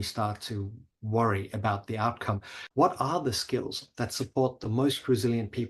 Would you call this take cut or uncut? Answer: cut